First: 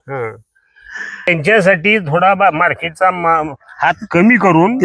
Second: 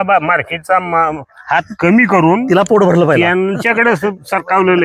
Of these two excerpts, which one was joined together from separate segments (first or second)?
first